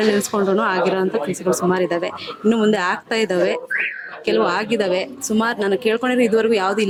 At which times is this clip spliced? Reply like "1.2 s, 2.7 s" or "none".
none